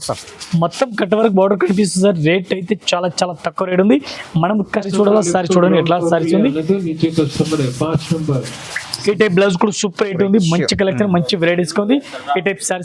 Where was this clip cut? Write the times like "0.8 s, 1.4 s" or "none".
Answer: 4.9 s

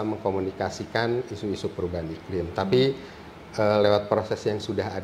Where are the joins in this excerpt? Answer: none

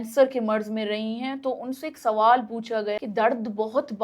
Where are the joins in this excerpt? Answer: 3.0 s

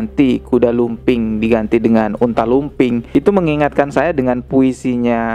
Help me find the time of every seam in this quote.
3.0 s

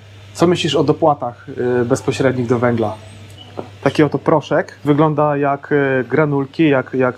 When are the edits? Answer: 3.4 s, 4.8 s

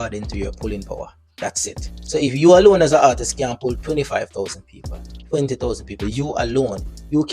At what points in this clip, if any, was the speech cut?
none

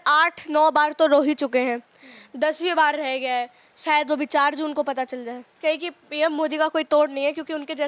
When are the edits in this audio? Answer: 5.5 s

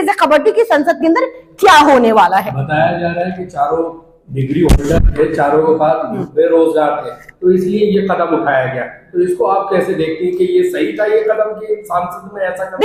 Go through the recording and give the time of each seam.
none

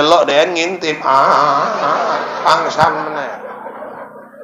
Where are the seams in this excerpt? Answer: none

